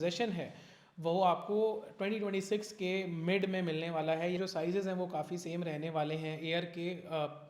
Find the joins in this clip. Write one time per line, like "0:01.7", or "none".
0:04.3